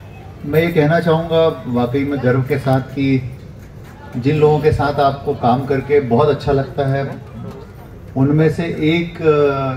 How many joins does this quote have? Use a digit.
0